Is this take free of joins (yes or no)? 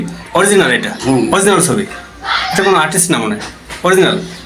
yes